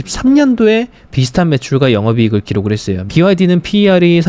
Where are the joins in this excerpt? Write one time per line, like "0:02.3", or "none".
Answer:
0:02.9